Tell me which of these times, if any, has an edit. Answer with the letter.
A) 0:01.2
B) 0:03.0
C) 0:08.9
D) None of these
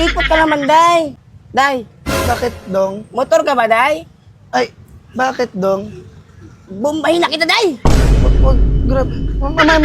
A